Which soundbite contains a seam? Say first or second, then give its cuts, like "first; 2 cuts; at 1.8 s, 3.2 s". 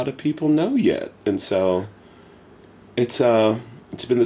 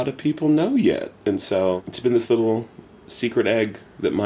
second; 1 cut; at 1.9 s